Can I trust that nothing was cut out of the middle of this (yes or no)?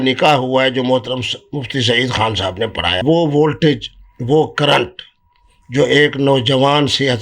no